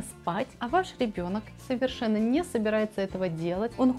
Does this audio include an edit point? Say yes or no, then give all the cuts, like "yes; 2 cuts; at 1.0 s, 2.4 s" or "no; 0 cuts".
no; 0 cuts